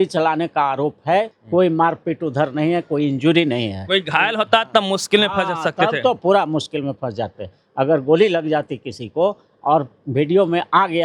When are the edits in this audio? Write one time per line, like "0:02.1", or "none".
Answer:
0:01.4